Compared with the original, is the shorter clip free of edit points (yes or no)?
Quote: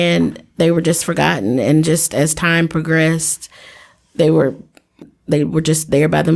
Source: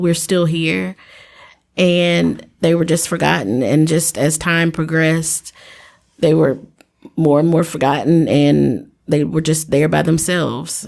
no